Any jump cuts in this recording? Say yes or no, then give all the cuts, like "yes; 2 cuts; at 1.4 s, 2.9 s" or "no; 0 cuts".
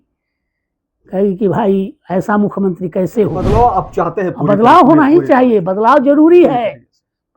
yes; 1 cut; at 3.4 s